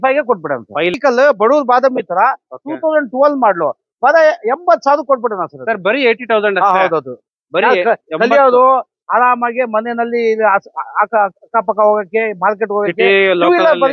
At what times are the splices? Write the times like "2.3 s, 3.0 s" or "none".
1.0 s